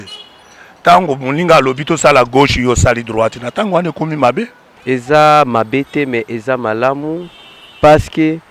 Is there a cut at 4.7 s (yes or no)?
yes